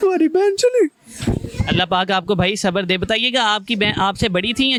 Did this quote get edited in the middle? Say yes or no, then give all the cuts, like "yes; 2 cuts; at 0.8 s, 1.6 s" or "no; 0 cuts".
no; 0 cuts